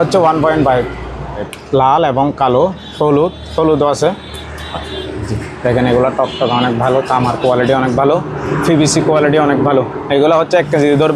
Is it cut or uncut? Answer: cut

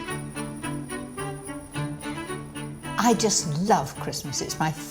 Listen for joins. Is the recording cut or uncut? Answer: cut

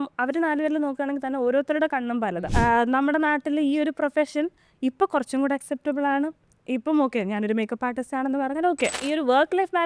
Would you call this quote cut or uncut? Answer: cut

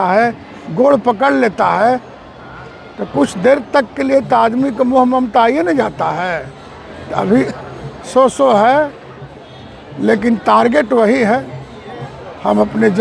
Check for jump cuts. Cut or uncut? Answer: uncut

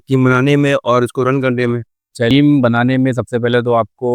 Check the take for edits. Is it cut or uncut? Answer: cut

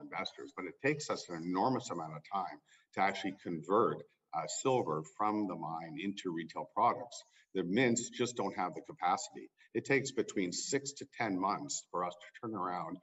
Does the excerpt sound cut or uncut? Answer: uncut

